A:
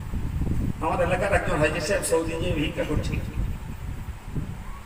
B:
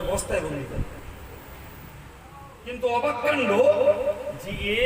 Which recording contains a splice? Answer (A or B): B